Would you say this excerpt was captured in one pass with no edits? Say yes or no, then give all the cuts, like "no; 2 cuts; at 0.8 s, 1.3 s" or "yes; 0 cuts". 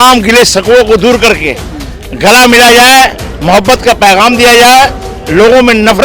yes; 0 cuts